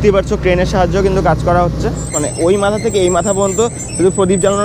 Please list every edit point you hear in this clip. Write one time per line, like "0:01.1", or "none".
0:02.1